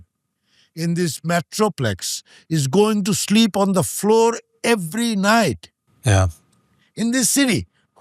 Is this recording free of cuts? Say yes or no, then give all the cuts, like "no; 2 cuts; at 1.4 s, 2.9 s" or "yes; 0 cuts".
yes; 0 cuts